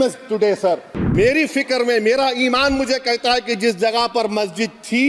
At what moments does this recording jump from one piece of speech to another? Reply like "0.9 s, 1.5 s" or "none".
0.9 s